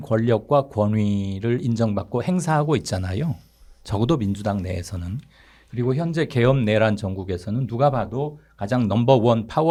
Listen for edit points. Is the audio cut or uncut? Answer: uncut